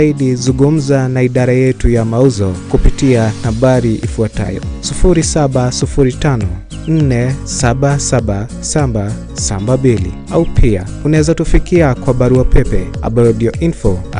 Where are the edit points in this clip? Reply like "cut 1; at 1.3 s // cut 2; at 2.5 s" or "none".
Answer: cut 1; at 11.4 s